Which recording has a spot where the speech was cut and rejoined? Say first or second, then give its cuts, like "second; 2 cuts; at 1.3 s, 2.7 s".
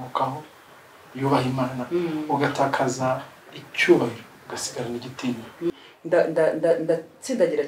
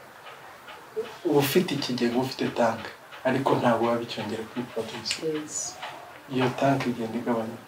first; 1 cut; at 5.7 s